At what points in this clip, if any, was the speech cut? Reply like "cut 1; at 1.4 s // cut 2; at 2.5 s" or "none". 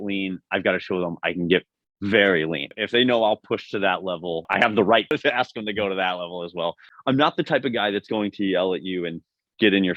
cut 1; at 2.7 s // cut 2; at 4.5 s // cut 3; at 5.1 s // cut 4; at 6.9 s